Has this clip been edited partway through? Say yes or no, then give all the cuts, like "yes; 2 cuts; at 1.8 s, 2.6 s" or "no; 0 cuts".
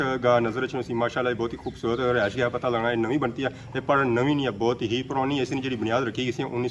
no; 0 cuts